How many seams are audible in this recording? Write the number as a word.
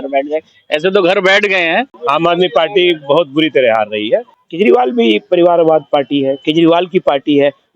two